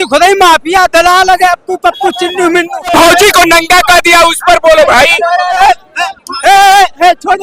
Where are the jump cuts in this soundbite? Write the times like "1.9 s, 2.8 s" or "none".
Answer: 2.9 s, 5.6 s